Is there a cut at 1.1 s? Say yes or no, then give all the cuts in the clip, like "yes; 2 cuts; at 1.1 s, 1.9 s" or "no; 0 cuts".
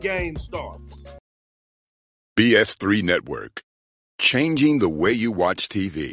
yes; 1 cut; at 1.1 s